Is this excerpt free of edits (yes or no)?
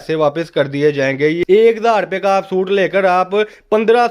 no